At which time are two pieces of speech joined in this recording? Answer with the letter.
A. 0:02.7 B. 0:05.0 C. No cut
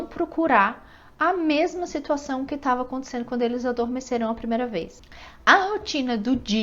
B